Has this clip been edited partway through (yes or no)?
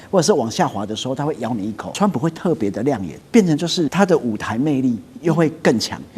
yes